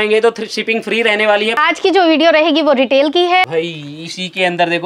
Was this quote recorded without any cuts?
no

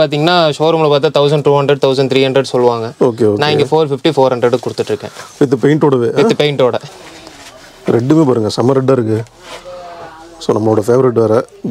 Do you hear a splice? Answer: yes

